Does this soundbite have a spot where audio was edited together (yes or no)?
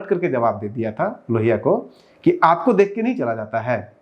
no